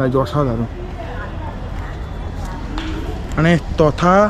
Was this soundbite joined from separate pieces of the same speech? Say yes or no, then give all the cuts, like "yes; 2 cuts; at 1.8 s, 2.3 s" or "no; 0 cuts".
no; 0 cuts